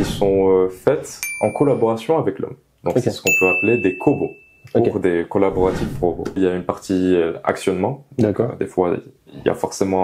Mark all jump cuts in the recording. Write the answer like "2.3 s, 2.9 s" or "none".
6.4 s